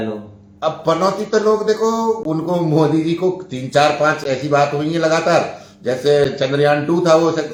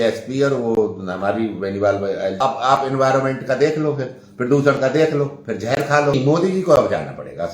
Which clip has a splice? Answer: second; 2 cuts; at 2.4 s, 6.1 s

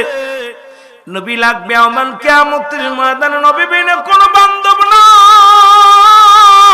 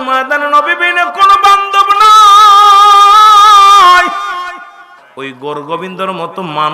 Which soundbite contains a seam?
second; 1 cut; at 5.0 s

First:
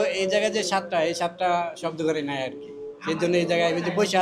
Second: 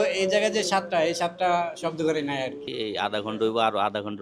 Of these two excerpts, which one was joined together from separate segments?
second; 1 cut; at 2.6 s

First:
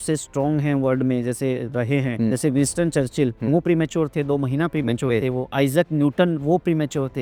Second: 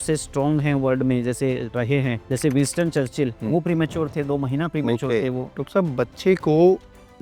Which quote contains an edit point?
second; 1 cut; at 5.5 s

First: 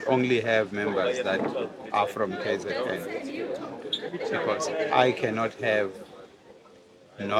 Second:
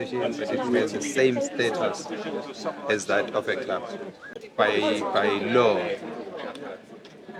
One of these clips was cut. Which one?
second; 1 cut; at 4.4 s

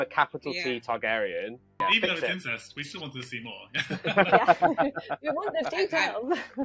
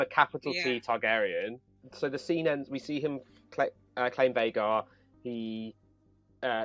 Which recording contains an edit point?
first; 1 cut; at 1.7 s

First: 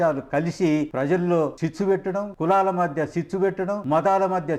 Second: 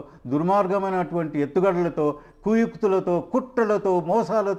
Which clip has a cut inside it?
first; 3 cuts; at 0.9 s, 1.9 s, 3.8 s

